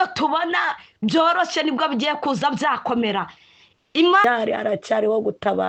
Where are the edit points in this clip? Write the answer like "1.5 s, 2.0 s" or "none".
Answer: 4.2 s